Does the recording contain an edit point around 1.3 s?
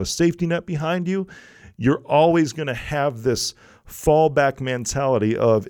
no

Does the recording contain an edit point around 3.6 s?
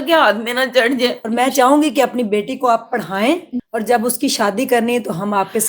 yes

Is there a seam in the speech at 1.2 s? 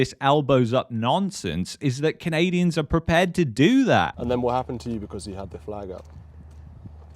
no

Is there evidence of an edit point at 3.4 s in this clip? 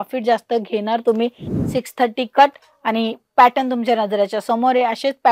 no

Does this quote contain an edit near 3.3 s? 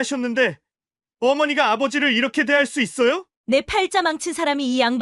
yes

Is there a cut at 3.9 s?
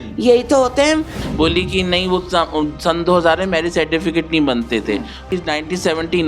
no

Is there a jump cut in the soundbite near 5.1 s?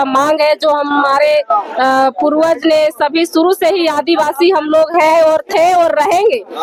no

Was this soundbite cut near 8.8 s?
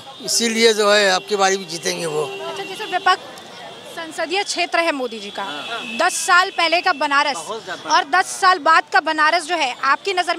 no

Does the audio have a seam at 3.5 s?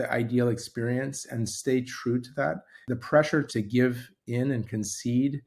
yes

